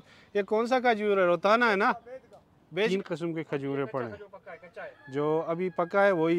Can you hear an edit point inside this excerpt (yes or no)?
yes